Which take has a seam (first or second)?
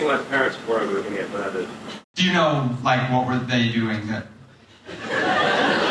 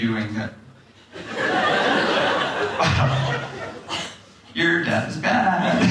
first